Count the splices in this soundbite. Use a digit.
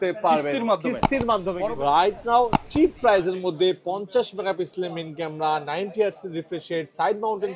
1